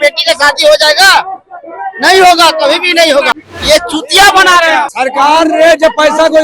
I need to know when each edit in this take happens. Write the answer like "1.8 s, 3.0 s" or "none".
3.4 s, 4.9 s